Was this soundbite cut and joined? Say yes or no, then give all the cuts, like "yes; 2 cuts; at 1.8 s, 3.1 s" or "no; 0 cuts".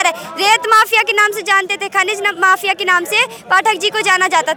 no; 0 cuts